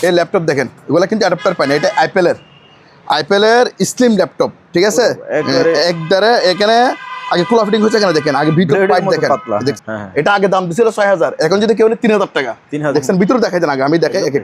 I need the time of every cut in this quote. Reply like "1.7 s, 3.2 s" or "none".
9.8 s, 12.9 s

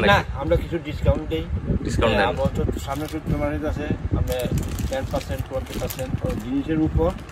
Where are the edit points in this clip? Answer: none

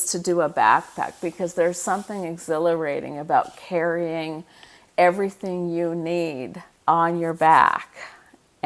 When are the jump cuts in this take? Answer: 6.3 s

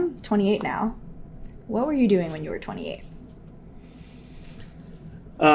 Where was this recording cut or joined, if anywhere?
none

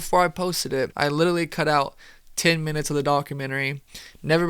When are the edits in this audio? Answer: 0.9 s

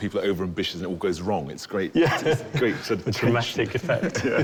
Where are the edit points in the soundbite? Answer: none

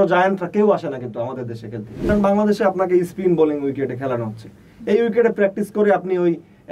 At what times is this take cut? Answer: 2.0 s

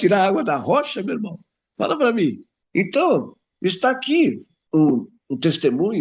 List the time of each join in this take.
2.5 s, 4.5 s

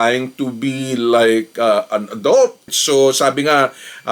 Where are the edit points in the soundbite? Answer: 2.7 s

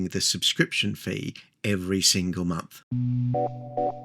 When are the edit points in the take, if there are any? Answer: 2.7 s

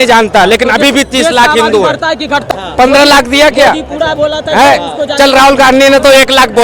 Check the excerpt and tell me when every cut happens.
2.5 s

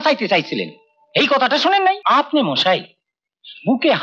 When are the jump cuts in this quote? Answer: 2.0 s

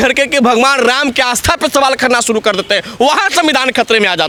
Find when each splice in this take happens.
none

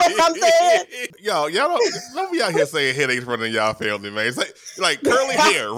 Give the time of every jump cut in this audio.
1.1 s

